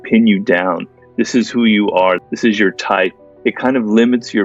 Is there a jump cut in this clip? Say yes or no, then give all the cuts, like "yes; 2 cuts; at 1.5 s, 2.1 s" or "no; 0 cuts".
yes; 2 cuts; at 2.3 s, 3.3 s